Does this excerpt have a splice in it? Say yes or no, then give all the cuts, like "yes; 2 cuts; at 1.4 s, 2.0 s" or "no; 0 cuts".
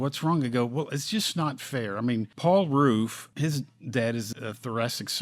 yes; 3 cuts; at 2.3 s, 3.2 s, 4.3 s